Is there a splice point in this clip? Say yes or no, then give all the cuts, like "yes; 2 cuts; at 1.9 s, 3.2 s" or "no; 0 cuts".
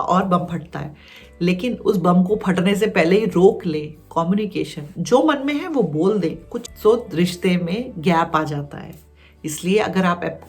yes; 1 cut; at 6.5 s